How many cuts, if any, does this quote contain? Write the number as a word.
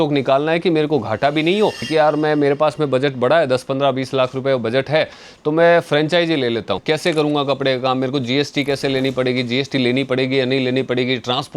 two